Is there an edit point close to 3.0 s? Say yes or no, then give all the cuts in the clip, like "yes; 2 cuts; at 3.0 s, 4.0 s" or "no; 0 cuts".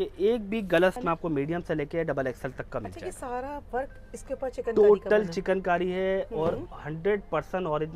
no; 1 cut; at 1.0 s